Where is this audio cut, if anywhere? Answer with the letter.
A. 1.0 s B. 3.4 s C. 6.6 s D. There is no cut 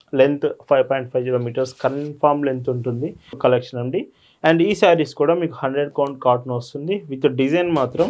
B